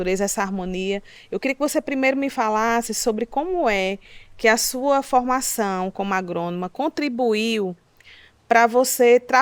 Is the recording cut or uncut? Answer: uncut